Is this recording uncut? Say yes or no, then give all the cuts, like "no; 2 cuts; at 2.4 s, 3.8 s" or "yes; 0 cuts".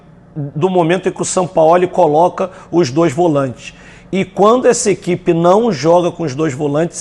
yes; 0 cuts